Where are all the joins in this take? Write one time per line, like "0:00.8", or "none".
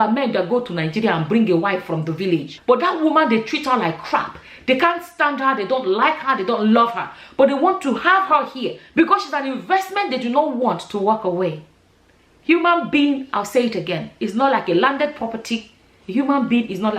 0:02.5